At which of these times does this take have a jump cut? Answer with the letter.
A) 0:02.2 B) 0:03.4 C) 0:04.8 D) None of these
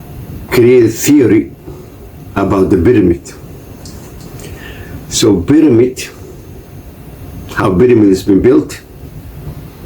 C